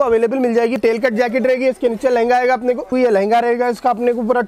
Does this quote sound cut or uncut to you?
cut